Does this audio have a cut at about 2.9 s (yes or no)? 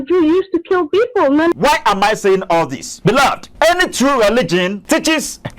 yes